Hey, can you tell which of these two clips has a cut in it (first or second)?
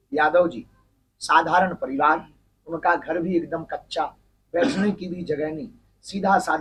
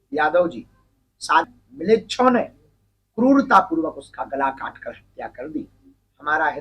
second